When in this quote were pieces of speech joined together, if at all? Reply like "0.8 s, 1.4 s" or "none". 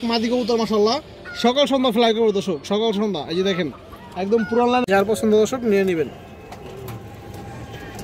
5.0 s